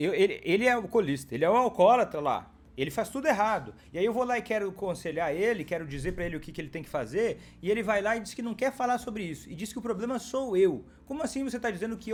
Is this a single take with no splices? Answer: yes; 0 cuts

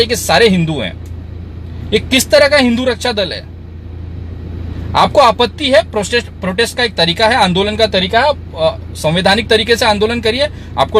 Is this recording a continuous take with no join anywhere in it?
yes; 0 cuts

